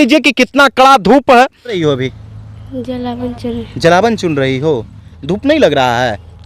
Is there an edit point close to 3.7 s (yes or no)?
no